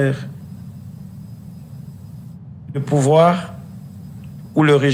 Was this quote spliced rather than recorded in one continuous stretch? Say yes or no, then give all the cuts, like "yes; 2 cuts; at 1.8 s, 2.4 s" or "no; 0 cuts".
no; 0 cuts